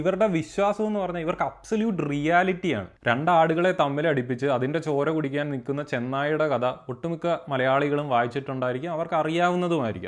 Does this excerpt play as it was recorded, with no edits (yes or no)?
no